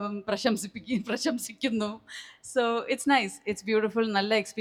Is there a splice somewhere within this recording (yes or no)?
no